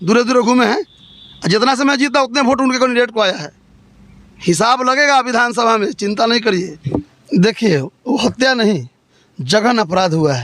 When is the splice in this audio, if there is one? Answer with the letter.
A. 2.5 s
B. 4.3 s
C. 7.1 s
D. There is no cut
C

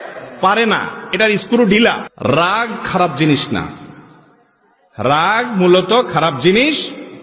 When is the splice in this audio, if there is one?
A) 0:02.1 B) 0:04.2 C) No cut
A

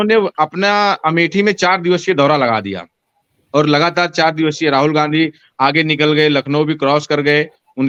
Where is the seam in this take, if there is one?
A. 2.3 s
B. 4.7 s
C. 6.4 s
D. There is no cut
D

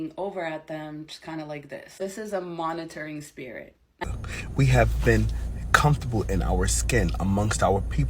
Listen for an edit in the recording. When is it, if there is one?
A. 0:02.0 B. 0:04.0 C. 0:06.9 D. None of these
B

